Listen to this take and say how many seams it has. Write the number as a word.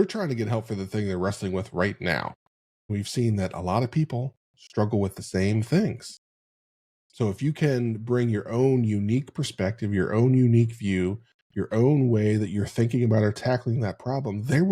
one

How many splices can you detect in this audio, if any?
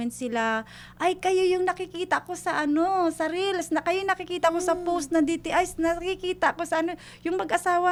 zero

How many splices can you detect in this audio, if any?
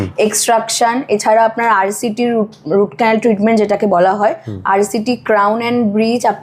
zero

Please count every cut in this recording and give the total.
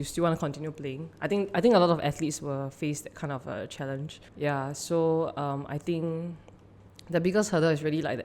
one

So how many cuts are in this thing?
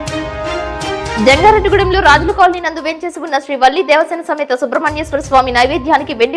one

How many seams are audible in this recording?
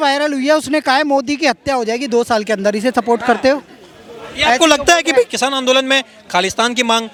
zero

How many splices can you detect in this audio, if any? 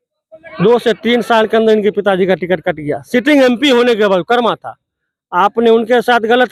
zero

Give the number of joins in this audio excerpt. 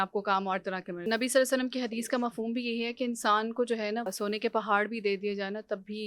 two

